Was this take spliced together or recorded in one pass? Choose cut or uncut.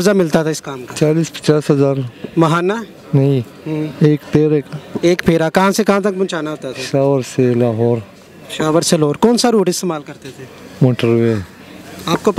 uncut